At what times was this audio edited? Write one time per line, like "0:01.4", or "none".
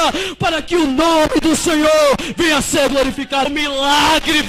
0:03.5